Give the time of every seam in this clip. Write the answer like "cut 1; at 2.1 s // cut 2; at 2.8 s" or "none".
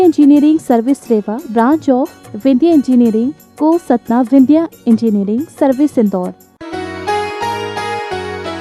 cut 1; at 6.4 s